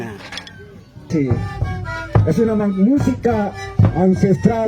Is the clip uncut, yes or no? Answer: no